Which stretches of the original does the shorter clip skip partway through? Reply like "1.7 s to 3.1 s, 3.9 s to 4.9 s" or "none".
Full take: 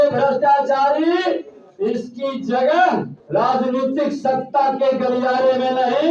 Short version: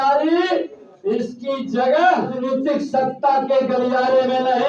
3.1 s to 3.7 s